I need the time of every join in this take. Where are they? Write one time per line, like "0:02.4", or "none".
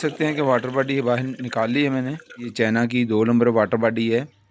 0:02.5